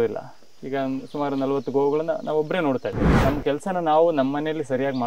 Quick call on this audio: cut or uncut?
cut